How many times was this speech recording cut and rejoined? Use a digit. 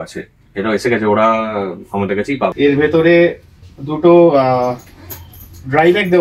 1